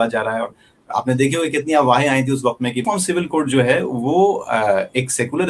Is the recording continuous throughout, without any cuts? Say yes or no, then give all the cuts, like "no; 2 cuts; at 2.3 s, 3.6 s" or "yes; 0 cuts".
no; 1 cut; at 2.8 s